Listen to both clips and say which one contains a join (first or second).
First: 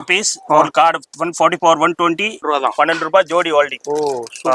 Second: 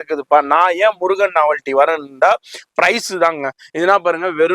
first